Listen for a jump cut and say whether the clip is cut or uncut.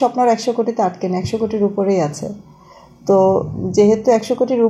uncut